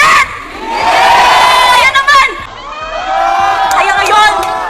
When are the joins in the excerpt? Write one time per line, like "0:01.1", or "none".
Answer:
0:02.4